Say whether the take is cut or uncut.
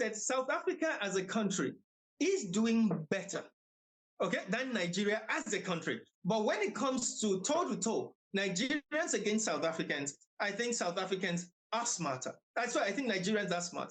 uncut